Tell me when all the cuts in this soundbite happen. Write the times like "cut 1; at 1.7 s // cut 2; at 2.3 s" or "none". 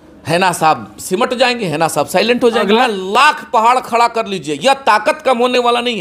cut 1; at 2.8 s